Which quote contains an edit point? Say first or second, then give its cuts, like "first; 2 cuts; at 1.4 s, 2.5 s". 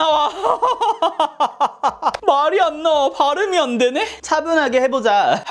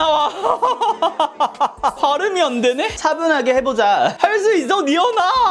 second; 2 cuts; at 2.0 s, 2.9 s